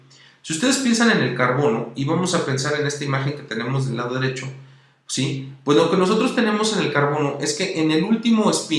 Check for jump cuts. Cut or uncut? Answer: cut